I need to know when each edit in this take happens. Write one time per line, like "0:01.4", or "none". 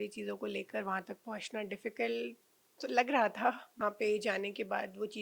0:03.7

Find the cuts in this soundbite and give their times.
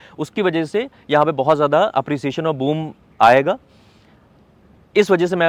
none

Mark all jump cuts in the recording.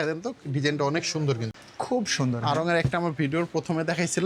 0:01.5

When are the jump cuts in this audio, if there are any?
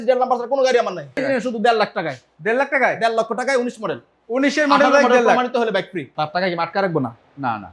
0:01.2
0:06.0

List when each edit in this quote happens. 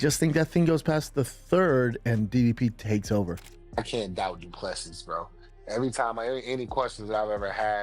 0:03.5

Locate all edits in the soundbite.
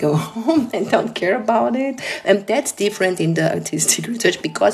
0:02.0

